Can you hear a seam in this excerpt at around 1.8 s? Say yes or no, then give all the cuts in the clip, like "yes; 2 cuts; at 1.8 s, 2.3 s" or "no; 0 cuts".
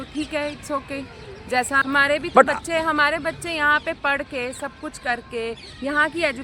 yes; 1 cut; at 1.8 s